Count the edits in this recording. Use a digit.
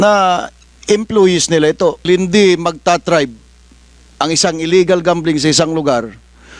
1